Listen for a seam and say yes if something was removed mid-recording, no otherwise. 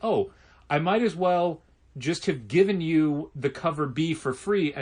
no